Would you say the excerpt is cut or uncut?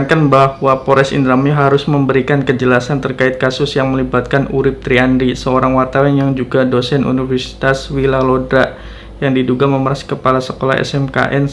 uncut